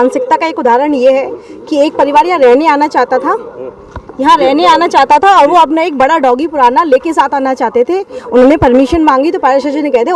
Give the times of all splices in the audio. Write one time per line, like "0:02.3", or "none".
none